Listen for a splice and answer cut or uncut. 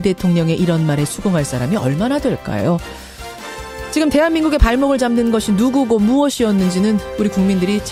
uncut